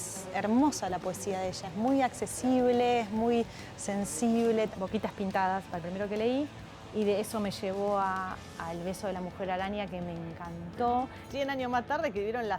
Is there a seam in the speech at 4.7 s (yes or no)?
yes